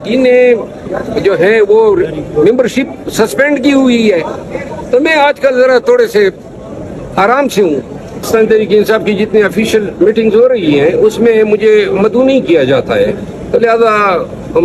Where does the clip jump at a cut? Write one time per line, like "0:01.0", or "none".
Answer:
0:08.2

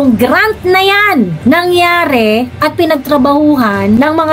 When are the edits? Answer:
none

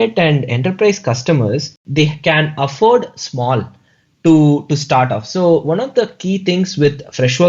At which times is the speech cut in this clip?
0:01.8

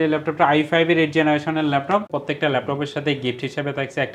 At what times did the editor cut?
0:02.1

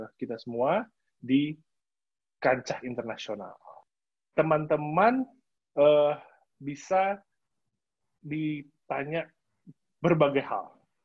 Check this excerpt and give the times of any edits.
0:03.8

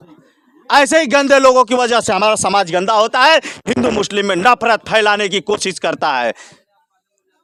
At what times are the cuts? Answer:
none

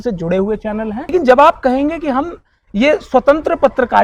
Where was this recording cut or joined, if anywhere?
0:01.1

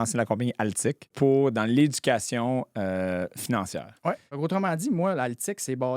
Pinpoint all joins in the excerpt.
0:01.1
0:04.3

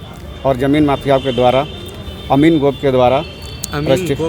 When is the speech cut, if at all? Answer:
none

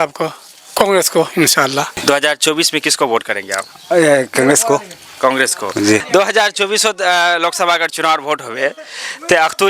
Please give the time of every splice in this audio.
0:02.0
0:06.0

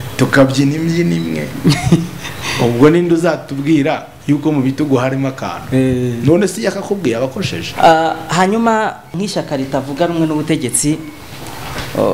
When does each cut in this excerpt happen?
0:07.7
0:09.1

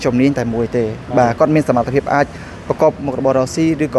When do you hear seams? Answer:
none

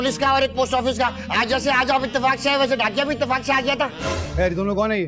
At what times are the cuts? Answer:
none

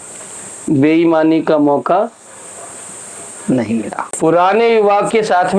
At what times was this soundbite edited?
0:04.1

